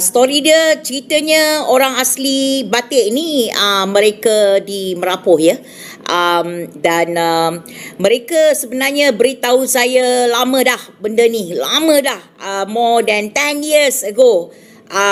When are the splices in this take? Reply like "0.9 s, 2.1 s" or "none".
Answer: none

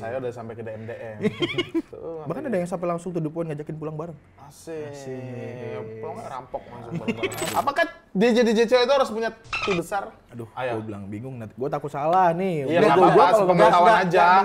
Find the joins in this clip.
1.9 s, 7.4 s, 10.2 s

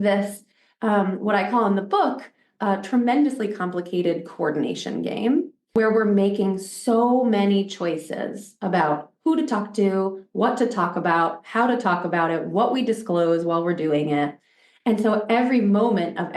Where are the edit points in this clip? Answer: 5.7 s

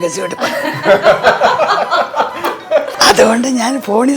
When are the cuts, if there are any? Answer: 3.0 s

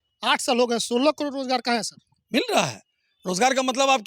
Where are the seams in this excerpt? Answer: none

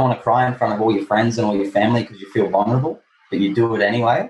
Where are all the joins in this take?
none

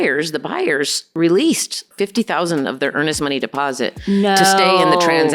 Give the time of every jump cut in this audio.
1.0 s, 1.9 s

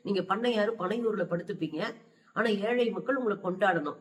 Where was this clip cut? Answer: none

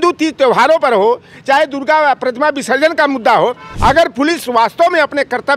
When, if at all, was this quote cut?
3.7 s

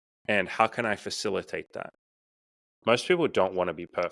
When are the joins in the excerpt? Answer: 2.0 s

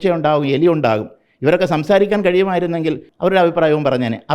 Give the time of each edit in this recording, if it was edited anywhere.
3.1 s

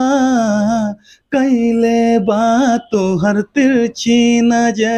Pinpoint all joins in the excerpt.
none

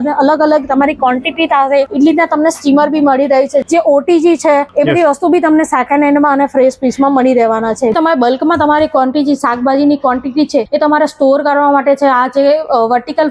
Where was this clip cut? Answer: 1.9 s, 3.6 s, 4.7 s, 7.9 s, 10.7 s

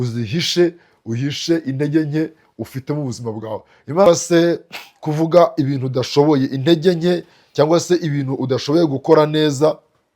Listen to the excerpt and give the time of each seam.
4.1 s

